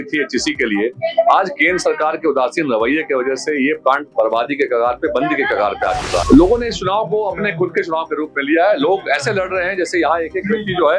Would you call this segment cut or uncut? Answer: cut